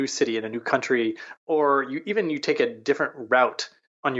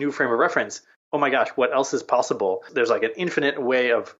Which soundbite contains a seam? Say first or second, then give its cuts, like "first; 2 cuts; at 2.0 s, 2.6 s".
second; 1 cut; at 2.7 s